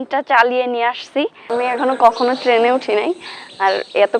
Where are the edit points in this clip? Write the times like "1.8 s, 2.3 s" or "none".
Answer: 1.4 s